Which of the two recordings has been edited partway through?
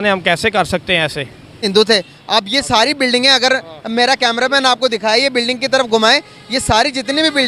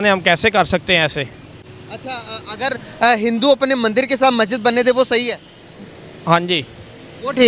first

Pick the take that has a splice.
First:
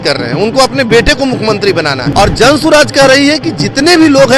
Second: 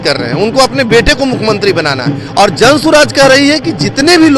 first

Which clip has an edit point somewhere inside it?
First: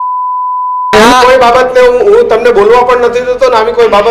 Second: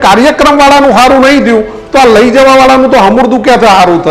first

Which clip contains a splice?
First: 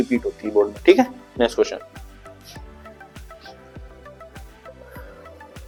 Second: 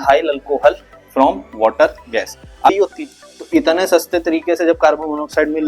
second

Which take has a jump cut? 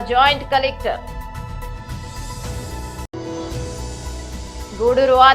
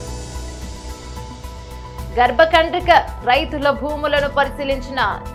first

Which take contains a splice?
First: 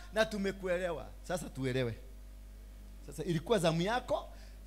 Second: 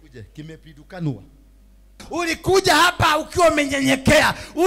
second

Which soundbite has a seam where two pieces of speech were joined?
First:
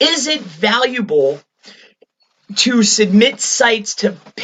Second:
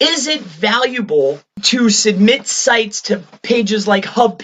second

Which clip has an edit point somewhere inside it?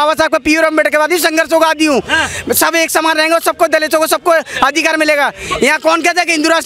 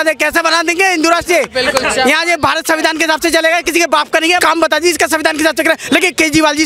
second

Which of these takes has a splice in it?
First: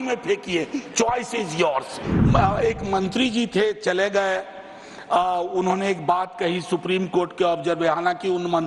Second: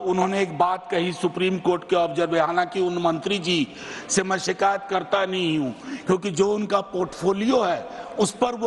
first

